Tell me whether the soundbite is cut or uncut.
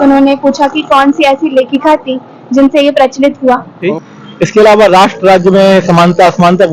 cut